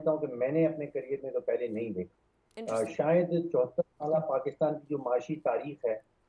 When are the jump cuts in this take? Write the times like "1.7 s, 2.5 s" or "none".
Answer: none